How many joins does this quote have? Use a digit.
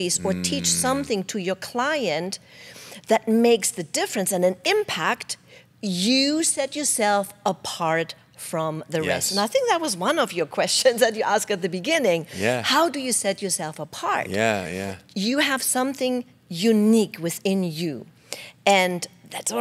0